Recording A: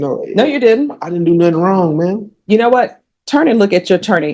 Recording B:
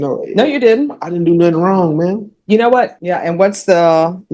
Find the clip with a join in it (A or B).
B